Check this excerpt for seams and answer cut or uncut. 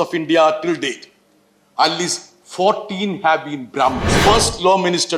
cut